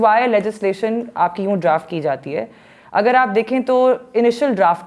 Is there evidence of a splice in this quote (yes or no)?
no